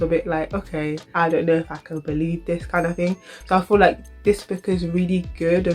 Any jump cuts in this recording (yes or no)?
yes